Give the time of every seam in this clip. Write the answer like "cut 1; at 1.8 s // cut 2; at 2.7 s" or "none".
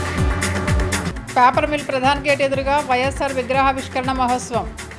cut 1; at 1.1 s

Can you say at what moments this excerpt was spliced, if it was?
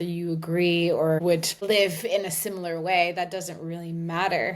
cut 1; at 1.4 s

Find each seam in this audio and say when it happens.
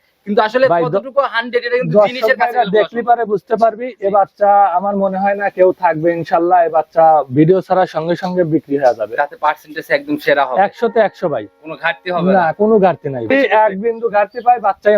cut 1; at 13.3 s

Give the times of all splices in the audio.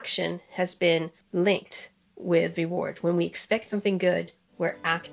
cut 1; at 1.2 s

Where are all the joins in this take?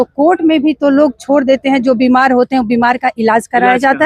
none

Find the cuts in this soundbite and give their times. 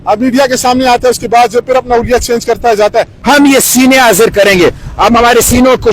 cut 1; at 3.2 s

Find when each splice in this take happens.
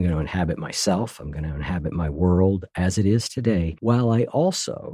cut 1; at 3.7 s

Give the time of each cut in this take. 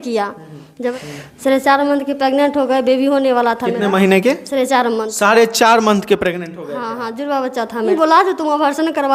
cut 1; at 0.9 s // cut 2; at 7.9 s

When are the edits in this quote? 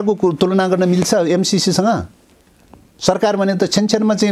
none

